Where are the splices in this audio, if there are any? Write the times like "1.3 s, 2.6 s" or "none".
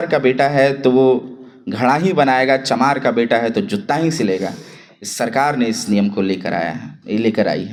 none